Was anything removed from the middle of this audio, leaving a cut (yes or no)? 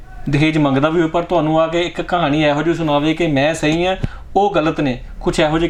no